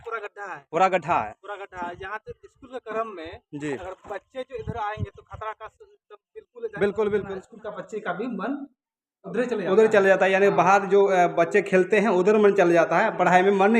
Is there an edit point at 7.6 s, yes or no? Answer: yes